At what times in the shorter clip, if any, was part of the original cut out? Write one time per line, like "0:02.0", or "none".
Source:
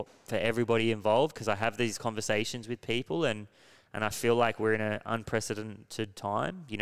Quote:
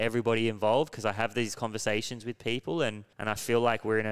0:03.1